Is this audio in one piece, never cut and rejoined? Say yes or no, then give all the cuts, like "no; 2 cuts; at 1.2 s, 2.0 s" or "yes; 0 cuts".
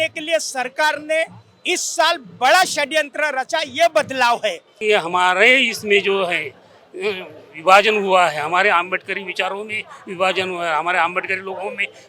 no; 1 cut; at 4.7 s